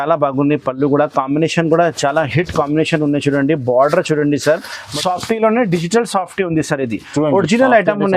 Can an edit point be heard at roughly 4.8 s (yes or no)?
yes